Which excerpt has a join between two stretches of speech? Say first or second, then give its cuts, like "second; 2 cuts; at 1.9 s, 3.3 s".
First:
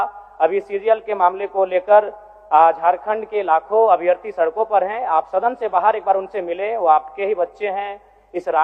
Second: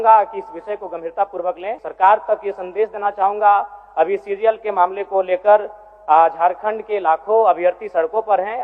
second; 1 cut; at 1.8 s